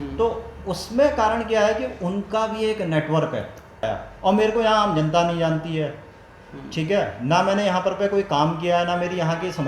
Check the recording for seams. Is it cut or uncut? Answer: cut